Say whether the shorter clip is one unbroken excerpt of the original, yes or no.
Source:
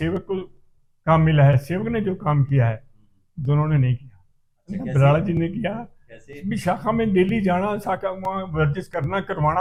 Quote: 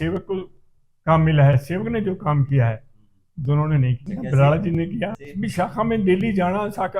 no